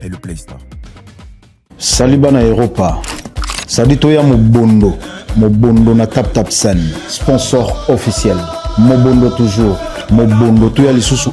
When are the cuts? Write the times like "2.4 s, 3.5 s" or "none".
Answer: none